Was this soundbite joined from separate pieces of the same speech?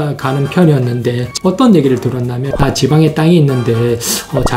yes; 2 cuts; at 1.3 s, 2.5 s

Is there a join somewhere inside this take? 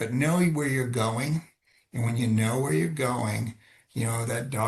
no; 0 cuts

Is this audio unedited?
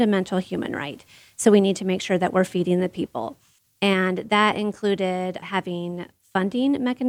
yes; 0 cuts

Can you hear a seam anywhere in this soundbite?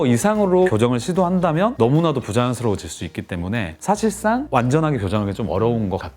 no; 0 cuts

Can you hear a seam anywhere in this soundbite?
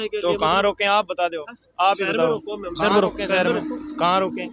no; 0 cuts

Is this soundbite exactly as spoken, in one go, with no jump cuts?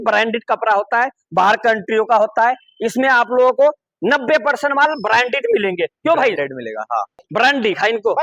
no; 1 cut; at 7.2 s

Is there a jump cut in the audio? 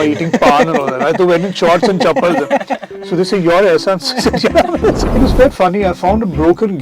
yes; 1 cut; at 5.2 s

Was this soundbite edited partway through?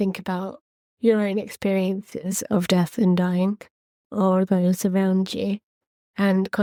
no; 0 cuts

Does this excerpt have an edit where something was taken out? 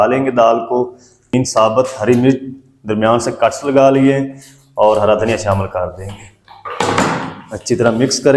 yes; 1 cut; at 1.3 s

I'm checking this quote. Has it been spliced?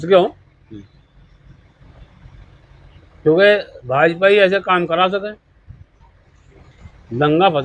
no; 0 cuts

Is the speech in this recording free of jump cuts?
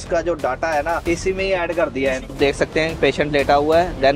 no; 2 cuts; at 1.0 s, 2.3 s

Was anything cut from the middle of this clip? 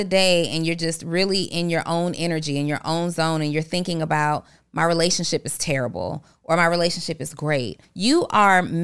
yes; 1 cut; at 7.8 s

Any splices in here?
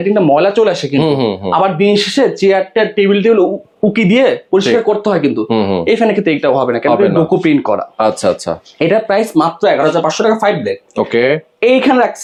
no; 0 cuts

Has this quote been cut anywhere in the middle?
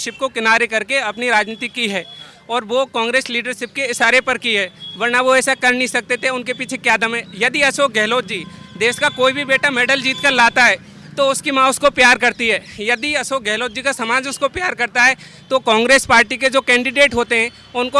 no; 0 cuts

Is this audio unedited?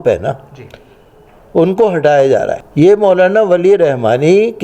no; 1 cut; at 2.6 s

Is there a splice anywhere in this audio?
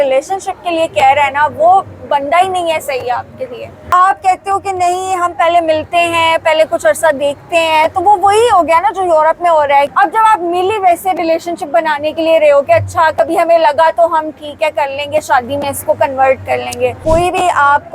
yes; 3 cuts; at 3.9 s, 9.9 s, 17.0 s

